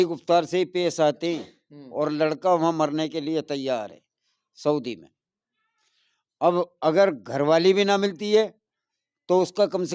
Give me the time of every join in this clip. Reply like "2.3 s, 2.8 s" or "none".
none

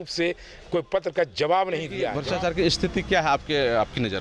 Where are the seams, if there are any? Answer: 2.2 s

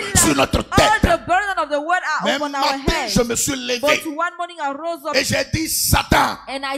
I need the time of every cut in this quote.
none

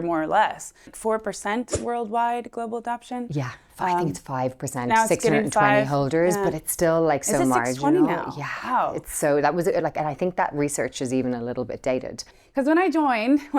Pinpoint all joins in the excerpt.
0.9 s, 12.2 s

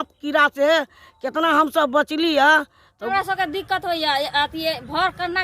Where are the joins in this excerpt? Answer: 3.1 s

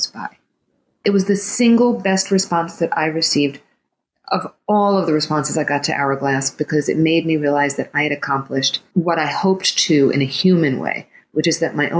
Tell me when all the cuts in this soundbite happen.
1.0 s, 8.8 s

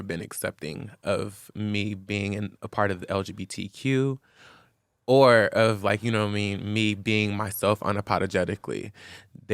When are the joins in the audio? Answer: none

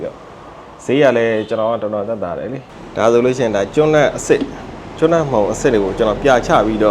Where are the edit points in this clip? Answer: 2.7 s

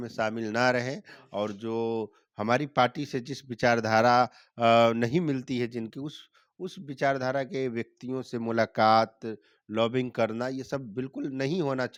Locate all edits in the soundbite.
none

